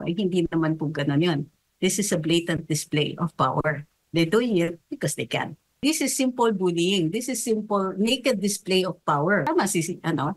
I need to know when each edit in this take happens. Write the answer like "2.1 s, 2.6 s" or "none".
5.8 s, 9.4 s